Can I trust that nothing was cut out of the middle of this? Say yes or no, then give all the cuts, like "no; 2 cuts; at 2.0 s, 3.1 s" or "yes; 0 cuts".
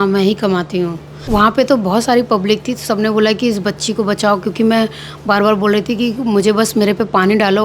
no; 1 cut; at 1.1 s